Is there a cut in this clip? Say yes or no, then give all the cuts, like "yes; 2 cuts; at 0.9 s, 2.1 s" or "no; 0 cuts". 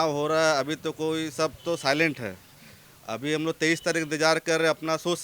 no; 0 cuts